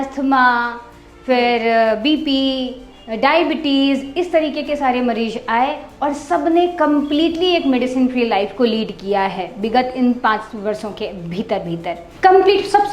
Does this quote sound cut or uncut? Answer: cut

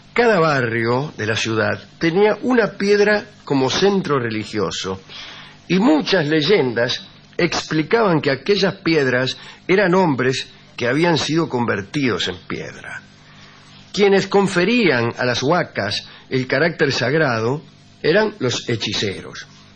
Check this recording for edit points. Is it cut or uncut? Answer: cut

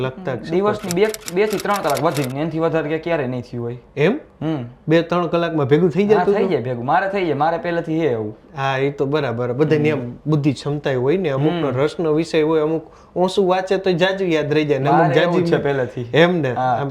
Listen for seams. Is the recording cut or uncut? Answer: uncut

